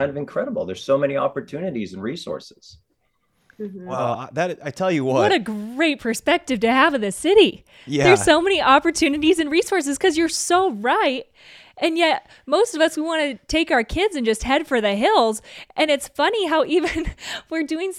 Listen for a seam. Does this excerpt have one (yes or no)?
no